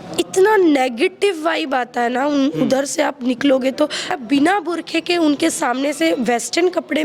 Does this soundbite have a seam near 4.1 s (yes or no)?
yes